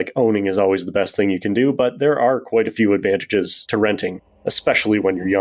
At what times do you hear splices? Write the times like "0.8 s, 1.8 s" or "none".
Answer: 3.9 s